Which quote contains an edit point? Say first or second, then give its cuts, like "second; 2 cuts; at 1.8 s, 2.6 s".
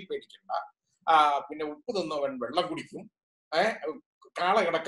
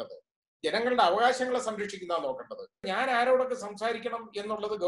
second; 1 cut; at 2.8 s